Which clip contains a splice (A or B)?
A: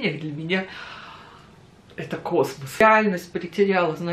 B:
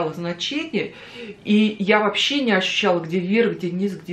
A